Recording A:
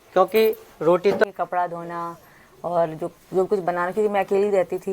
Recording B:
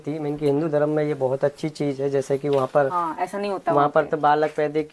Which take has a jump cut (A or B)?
A